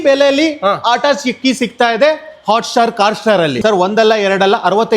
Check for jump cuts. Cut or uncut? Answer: cut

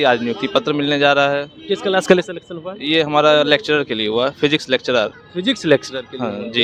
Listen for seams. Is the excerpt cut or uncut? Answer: uncut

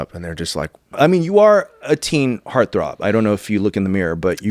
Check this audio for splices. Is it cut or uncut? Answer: cut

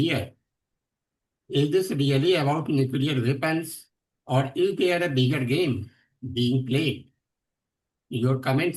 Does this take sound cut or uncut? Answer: uncut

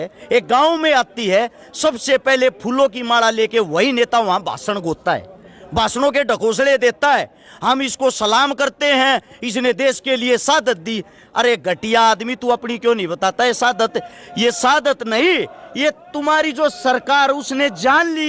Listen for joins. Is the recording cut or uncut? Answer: uncut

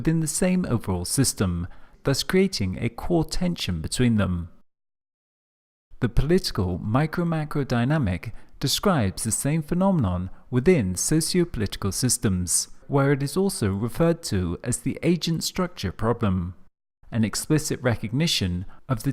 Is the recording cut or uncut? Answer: cut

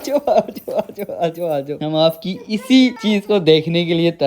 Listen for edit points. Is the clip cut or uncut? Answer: cut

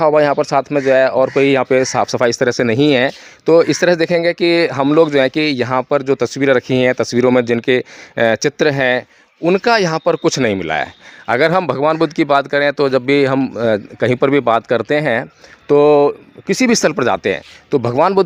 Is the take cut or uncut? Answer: uncut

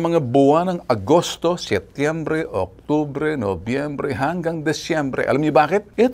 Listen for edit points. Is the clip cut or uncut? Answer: uncut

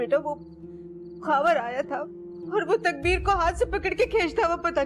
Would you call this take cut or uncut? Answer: cut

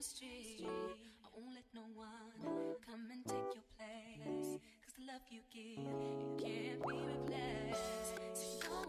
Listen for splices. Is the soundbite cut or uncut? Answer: cut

